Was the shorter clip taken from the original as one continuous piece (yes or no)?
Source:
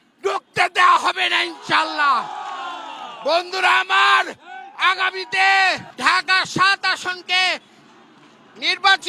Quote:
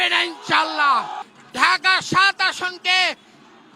no